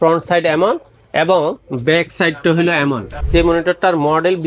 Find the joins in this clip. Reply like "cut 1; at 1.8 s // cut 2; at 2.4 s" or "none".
cut 1; at 3.2 s